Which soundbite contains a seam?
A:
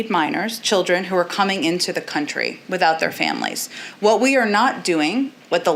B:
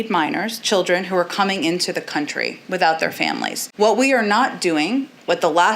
B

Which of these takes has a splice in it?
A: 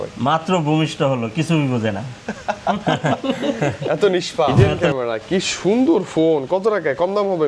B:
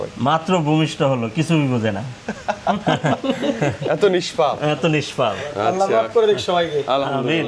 A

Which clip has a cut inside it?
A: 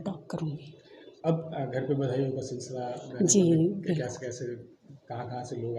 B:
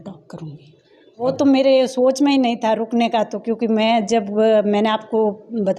B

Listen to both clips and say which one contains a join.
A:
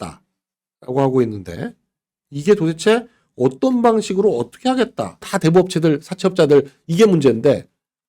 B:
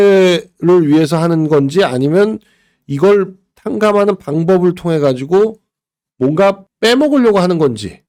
A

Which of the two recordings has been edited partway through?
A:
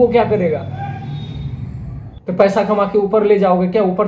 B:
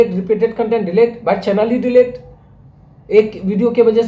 A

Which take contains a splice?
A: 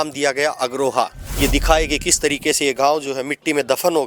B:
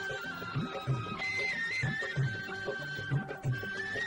A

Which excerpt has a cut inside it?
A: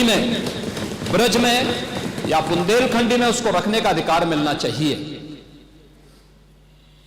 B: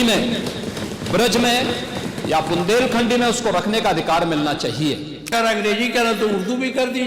B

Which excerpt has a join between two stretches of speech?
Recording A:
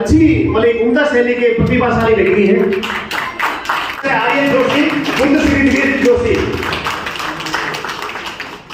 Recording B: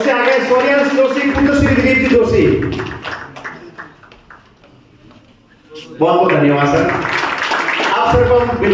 A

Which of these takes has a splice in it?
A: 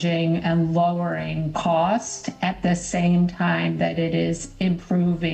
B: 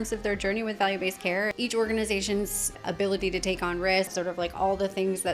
B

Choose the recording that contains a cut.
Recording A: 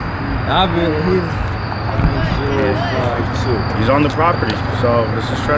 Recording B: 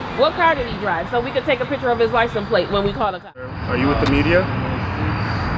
B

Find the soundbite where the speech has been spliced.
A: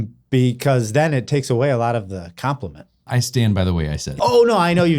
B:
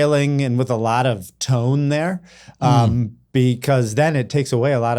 A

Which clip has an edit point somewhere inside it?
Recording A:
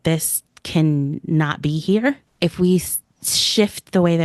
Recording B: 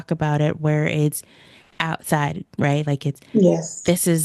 A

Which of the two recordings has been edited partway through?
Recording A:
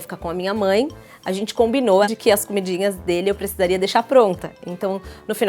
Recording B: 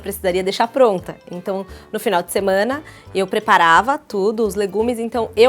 A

